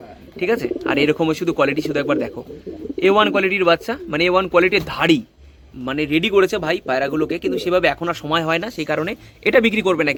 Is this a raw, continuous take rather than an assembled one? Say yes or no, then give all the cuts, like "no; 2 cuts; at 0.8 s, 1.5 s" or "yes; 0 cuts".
yes; 0 cuts